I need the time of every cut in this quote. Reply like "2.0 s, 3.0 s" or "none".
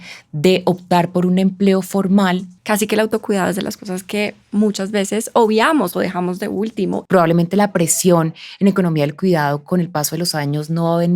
2.5 s, 7.0 s